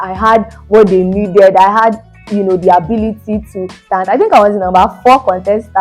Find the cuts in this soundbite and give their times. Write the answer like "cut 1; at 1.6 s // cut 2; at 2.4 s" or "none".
cut 1; at 3.8 s